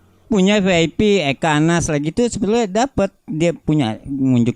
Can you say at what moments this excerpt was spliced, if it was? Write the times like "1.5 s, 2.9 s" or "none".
none